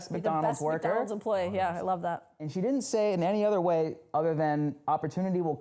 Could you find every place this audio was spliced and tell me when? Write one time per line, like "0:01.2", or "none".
none